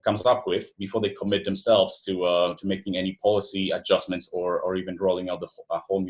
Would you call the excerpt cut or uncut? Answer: uncut